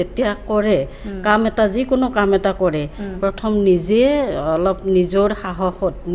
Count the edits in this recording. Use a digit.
0